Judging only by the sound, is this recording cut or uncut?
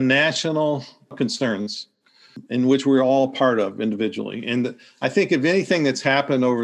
cut